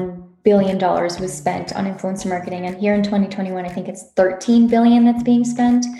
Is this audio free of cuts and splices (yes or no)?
yes